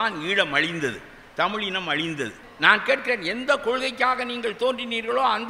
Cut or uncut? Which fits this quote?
cut